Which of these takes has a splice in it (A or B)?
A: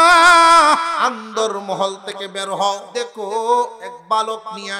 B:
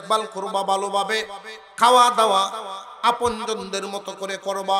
A